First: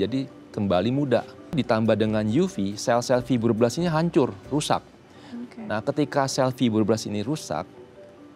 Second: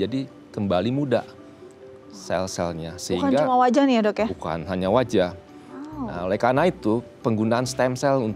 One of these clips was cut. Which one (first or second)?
first